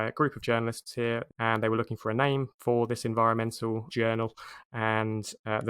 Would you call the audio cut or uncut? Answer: cut